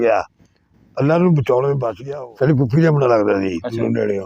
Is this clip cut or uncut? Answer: cut